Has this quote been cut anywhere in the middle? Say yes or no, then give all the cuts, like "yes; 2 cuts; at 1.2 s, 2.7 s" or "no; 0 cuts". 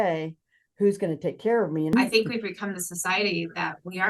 yes; 1 cut; at 1.9 s